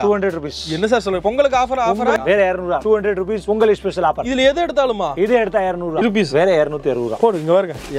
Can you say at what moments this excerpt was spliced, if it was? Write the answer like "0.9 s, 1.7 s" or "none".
2.2 s, 6.0 s